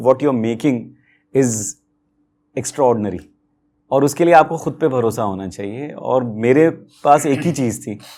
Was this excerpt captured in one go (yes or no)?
yes